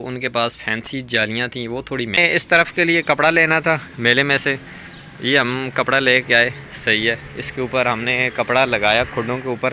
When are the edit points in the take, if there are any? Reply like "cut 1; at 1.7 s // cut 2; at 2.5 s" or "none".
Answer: cut 1; at 2.2 s